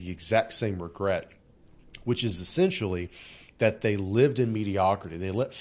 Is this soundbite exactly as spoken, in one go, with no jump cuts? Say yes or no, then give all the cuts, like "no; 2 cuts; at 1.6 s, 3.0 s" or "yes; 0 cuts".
yes; 0 cuts